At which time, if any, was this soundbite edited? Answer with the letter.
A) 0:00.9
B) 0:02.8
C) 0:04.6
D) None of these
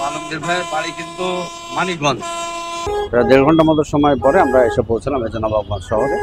B